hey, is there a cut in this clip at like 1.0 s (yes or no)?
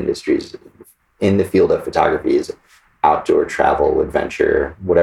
yes